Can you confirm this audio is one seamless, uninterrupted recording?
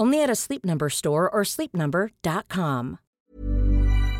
no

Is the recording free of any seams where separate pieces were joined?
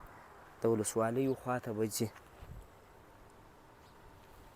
yes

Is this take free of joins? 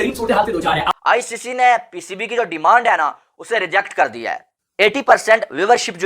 no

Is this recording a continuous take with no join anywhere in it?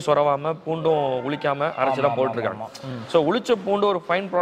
yes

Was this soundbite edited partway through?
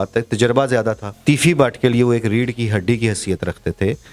yes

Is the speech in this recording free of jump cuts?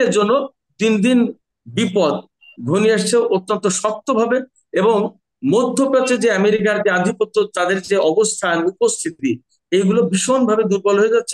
yes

